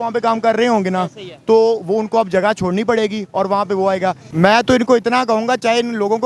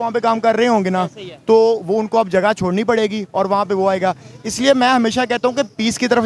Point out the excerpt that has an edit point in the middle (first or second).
first